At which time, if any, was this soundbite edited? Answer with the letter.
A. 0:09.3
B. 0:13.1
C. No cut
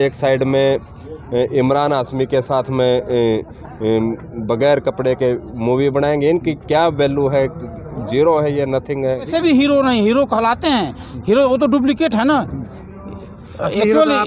A